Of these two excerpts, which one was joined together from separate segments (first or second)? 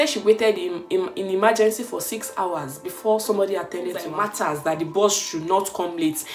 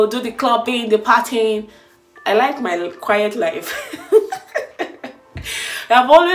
first